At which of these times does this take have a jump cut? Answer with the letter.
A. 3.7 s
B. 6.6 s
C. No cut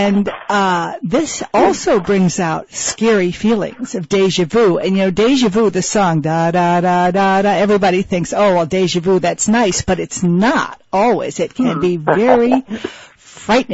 A